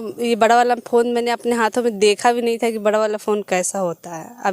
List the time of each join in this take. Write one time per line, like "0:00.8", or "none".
none